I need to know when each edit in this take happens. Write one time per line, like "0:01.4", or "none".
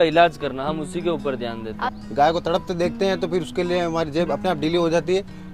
0:01.9